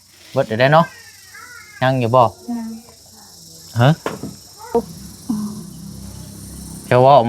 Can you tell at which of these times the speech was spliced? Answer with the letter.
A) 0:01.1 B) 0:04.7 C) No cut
B